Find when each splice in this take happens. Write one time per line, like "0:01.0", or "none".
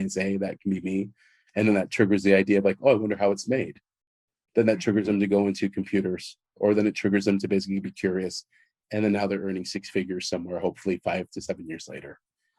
none